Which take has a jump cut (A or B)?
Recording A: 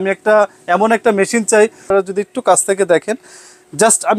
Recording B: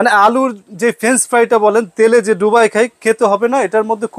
A